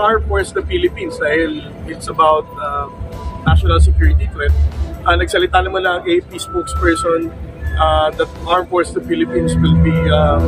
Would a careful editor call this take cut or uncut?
uncut